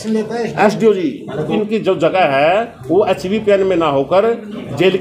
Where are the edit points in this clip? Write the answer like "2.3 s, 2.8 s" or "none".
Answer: 1.5 s